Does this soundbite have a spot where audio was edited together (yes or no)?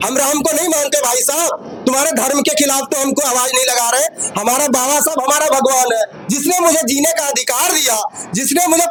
no